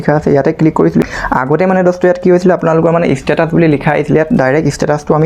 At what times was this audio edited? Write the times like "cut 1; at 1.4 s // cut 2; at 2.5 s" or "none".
cut 1; at 1.0 s